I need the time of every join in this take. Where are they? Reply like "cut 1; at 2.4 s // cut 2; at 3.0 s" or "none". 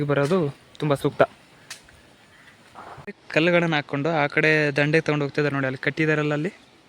cut 1; at 3.2 s